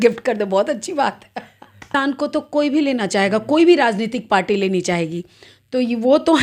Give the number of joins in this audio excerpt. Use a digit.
1